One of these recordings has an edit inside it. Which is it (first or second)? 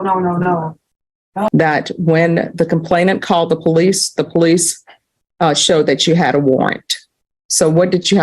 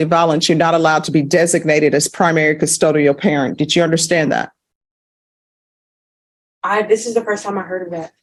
first